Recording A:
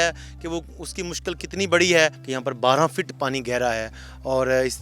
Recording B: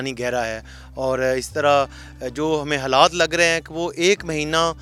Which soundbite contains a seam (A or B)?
A